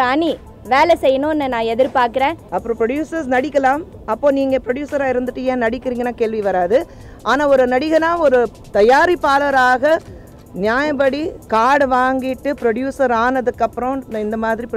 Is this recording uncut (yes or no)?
no